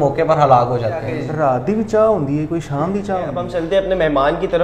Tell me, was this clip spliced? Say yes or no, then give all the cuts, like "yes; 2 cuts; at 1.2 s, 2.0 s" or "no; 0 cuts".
yes; 2 cuts; at 1.2 s, 3.4 s